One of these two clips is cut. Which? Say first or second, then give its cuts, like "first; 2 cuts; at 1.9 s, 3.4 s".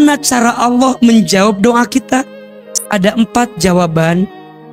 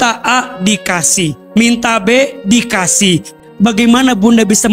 second; 1 cut; at 3.3 s